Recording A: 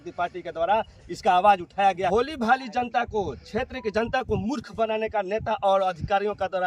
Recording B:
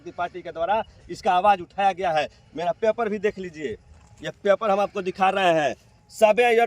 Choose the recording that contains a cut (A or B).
A